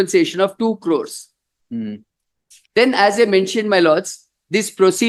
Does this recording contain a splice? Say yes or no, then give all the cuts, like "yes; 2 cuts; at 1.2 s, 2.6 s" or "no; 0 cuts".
no; 0 cuts